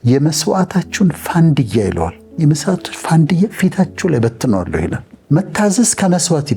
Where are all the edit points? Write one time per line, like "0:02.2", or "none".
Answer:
0:05.1